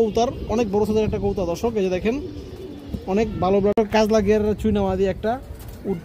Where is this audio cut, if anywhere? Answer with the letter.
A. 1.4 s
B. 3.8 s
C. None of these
B